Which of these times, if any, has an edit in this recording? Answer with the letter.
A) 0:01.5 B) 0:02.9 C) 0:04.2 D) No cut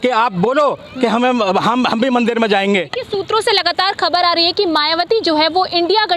B